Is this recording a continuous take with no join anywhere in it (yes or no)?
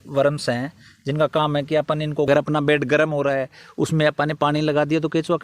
no